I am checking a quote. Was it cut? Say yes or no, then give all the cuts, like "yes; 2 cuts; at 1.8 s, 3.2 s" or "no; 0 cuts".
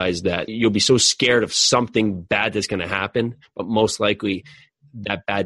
no; 0 cuts